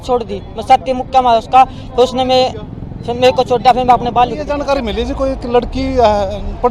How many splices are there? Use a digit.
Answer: 1